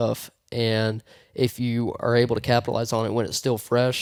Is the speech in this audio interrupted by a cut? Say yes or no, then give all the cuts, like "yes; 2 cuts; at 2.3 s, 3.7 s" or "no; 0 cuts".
no; 0 cuts